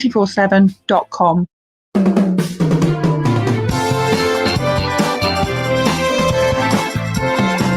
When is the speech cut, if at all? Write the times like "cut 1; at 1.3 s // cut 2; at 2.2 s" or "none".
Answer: cut 1; at 1.7 s